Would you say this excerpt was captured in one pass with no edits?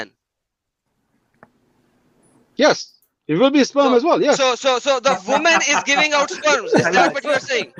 yes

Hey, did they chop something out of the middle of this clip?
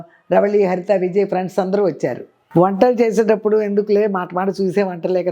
yes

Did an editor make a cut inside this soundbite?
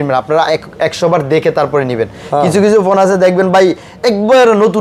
no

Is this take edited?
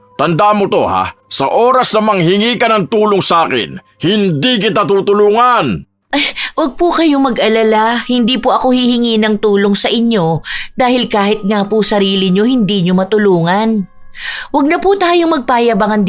yes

